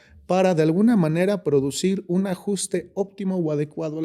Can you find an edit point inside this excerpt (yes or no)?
no